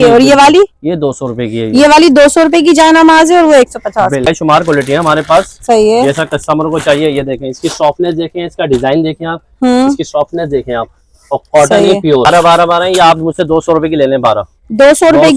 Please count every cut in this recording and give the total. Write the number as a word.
two